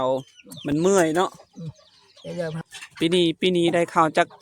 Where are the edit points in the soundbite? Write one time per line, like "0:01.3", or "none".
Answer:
0:02.6